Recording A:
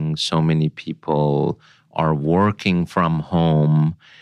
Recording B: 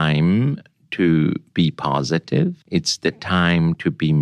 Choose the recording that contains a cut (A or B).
B